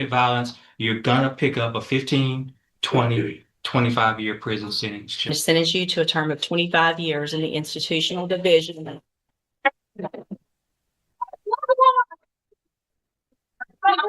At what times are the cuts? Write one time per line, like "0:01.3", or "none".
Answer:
0:05.3